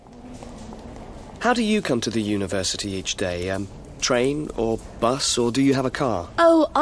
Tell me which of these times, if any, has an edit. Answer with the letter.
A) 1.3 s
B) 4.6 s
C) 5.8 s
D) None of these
A